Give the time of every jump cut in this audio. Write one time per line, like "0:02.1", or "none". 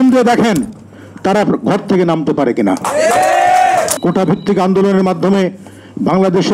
0:03.9